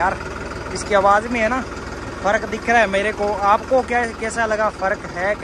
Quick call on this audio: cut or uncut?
uncut